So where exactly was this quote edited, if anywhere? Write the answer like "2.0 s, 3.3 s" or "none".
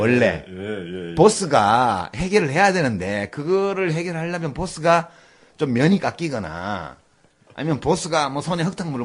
none